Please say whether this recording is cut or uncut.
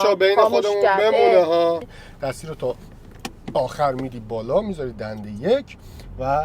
cut